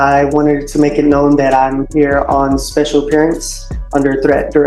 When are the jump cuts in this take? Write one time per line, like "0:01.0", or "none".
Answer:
none